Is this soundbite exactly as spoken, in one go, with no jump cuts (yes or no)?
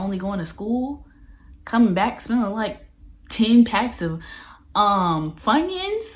yes